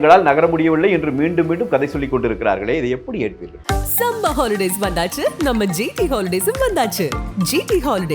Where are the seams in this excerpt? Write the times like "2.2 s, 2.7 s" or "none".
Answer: 3.5 s